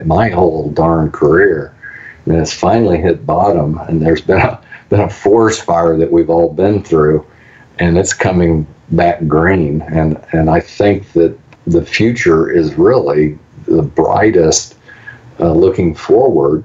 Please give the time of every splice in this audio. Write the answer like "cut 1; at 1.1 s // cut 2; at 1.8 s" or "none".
cut 1; at 11.5 s